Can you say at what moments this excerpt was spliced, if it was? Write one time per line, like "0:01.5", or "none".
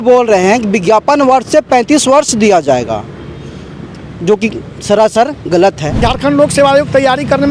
0:05.9